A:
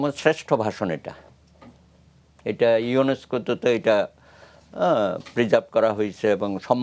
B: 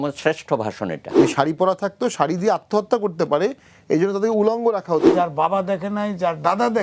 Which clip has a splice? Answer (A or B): B